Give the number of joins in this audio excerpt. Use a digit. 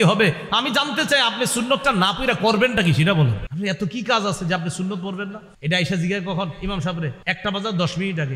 3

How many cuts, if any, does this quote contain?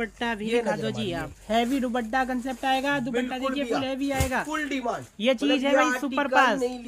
0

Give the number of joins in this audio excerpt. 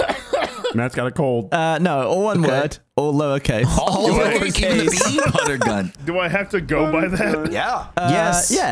3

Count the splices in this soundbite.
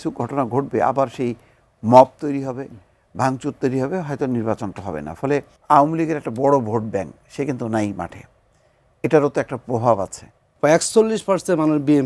2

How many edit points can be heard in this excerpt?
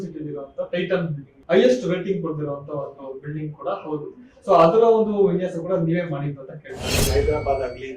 2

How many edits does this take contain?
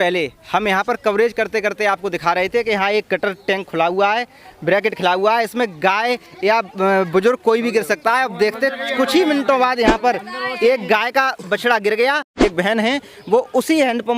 1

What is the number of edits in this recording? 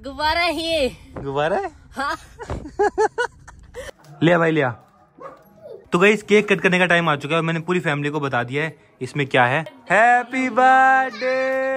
3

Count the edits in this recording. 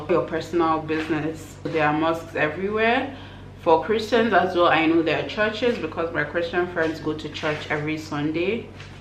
1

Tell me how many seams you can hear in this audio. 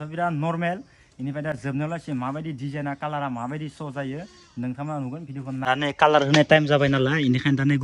1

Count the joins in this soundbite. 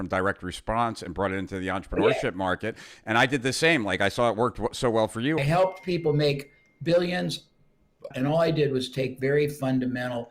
2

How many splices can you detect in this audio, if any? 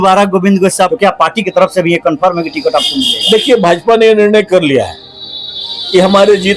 1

